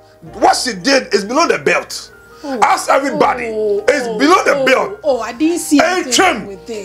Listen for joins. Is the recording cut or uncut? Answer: uncut